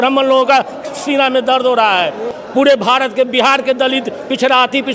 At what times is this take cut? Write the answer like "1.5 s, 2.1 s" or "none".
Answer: 2.4 s